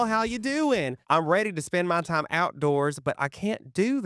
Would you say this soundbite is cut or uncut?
cut